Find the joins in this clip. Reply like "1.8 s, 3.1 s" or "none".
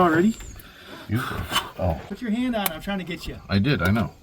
2.0 s